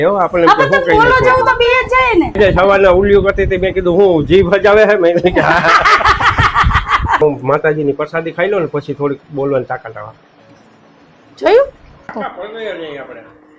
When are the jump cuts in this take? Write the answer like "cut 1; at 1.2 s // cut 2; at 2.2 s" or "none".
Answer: cut 1; at 2.4 s // cut 2; at 7.2 s // cut 3; at 12.2 s